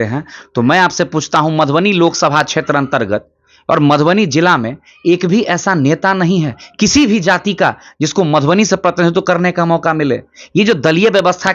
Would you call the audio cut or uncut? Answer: uncut